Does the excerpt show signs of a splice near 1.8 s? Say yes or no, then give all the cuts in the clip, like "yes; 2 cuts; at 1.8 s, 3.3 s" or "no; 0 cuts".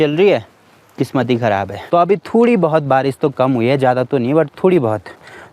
yes; 1 cut; at 1.8 s